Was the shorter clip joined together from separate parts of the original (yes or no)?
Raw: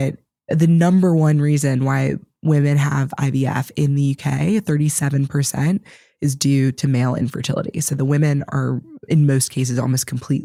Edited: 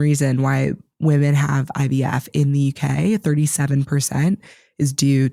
no